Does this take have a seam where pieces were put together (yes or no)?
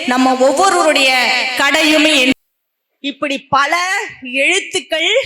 yes